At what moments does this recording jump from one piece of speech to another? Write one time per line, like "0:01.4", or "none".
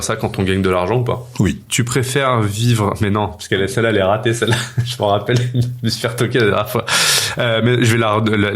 0:01.7